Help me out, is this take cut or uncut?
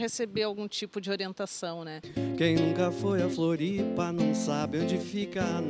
cut